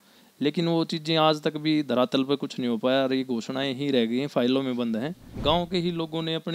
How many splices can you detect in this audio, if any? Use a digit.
1